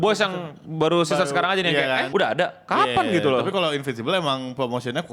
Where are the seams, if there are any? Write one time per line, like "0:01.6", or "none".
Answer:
0:02.1